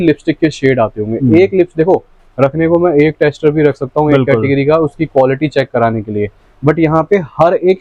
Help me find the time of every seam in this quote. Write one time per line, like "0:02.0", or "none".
none